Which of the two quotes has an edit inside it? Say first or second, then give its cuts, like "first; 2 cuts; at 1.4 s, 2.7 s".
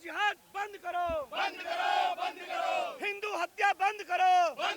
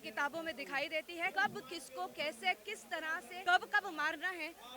second; 2 cuts; at 1.3 s, 3.3 s